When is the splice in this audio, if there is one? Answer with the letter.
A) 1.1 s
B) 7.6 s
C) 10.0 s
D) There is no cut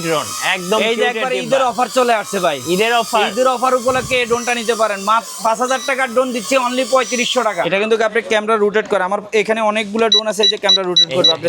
B